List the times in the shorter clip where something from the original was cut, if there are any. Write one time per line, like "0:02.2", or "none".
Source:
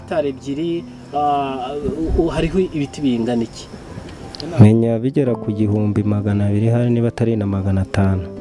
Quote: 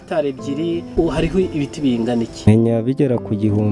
0:00.9
0:02.5

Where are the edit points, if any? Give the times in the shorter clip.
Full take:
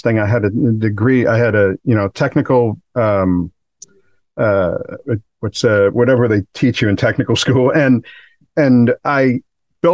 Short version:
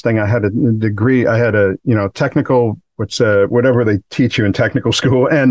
0:02.8

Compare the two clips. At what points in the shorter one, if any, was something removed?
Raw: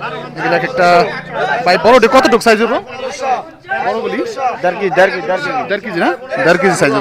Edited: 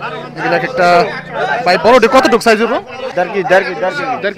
0:03.1

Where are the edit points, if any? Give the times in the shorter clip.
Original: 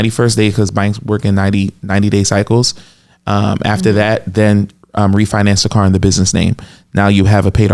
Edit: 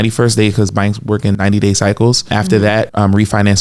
0:01.3
0:02.7

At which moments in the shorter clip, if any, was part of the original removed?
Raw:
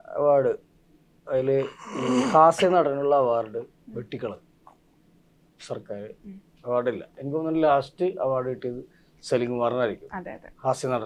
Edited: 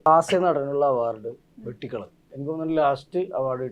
0:02.2

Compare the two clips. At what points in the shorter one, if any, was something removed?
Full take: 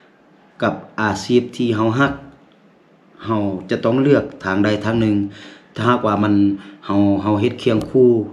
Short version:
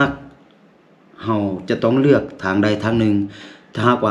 none

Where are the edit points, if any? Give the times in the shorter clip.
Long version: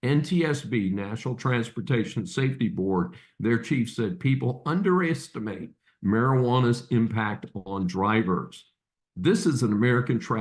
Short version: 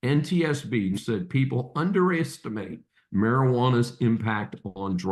0:01.0

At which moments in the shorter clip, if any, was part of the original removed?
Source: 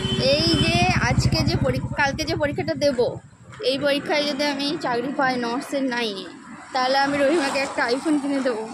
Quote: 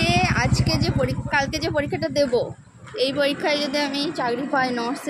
none

